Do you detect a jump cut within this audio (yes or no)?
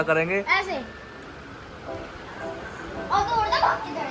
no